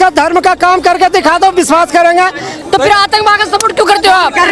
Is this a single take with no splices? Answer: no; 1 cut; at 2.6 s

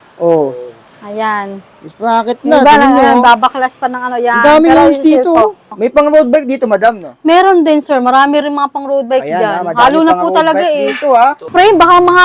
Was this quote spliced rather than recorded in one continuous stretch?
yes; 2 cuts; at 5.7 s, 11.4 s

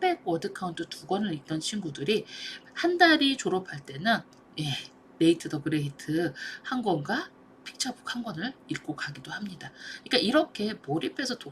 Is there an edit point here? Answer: no; 0 cuts

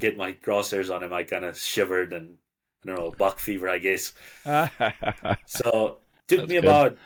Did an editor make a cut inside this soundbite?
no; 0 cuts

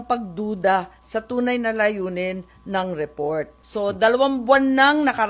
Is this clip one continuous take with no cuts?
no; 1 cut; at 3.6 s

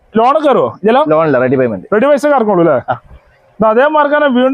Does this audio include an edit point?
no; 0 cuts

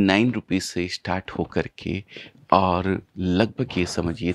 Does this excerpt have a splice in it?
no; 0 cuts

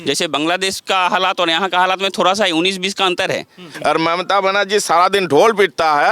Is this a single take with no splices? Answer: no; 1 cut; at 3.6 s

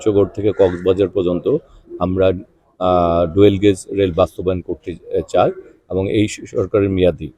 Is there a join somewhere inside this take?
no; 0 cuts

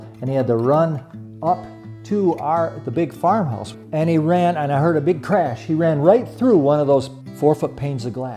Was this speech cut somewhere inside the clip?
yes; 2 cuts; at 3.6 s, 7.2 s

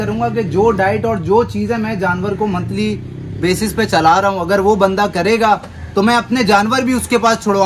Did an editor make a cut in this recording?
no; 0 cuts

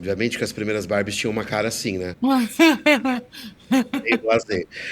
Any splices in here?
yes; 1 cut; at 2.1 s

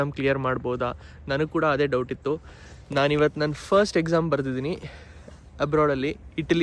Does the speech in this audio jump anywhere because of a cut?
no; 0 cuts

